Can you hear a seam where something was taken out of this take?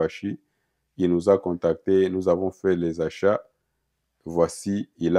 no; 0 cuts

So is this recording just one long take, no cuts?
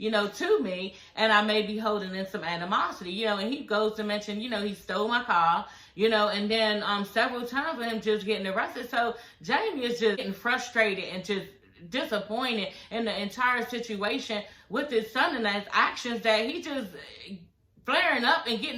yes; 0 cuts

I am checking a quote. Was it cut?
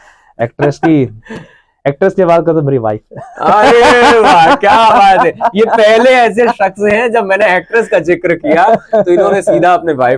no; 0 cuts

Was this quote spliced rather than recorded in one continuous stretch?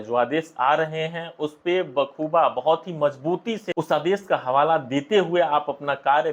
no; 0 cuts

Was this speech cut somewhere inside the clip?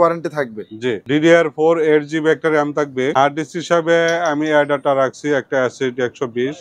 yes; 2 cuts; at 1.0 s, 3.1 s

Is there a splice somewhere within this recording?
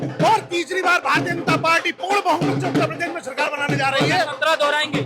no; 0 cuts

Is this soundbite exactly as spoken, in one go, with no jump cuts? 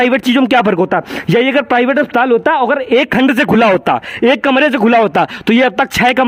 yes; 0 cuts

